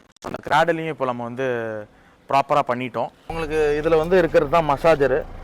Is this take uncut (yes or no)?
no